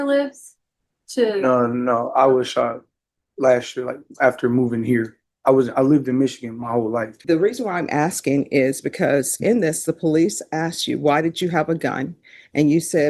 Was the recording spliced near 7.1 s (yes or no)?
yes